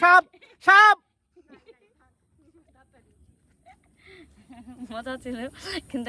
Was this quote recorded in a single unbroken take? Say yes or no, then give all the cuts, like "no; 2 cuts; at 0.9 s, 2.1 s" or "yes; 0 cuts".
yes; 0 cuts